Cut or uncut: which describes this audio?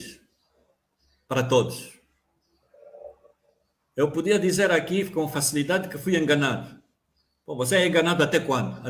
uncut